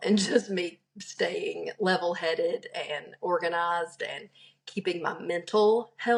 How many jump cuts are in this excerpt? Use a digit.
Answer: 0